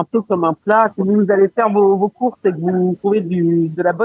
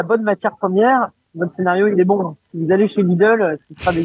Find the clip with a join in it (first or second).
first